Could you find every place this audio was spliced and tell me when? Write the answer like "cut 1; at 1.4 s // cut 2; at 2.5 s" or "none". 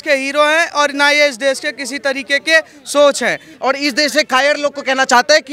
cut 1; at 3.5 s